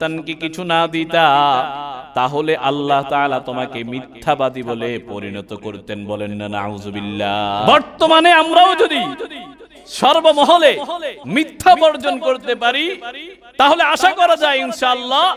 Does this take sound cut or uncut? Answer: cut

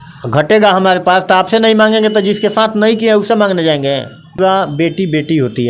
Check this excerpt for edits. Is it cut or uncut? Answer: cut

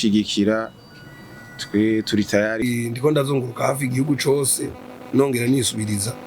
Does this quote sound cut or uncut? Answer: cut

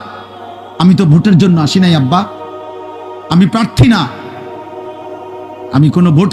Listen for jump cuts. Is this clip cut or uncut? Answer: uncut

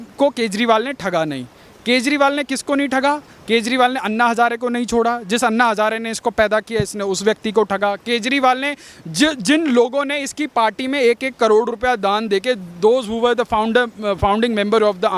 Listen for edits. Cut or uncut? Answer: uncut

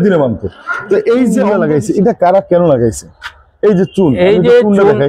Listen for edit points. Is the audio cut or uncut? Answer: cut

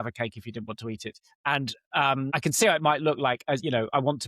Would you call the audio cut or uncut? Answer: cut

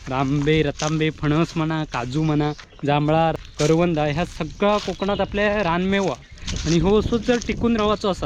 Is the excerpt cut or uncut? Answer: cut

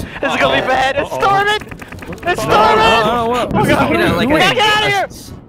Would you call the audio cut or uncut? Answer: cut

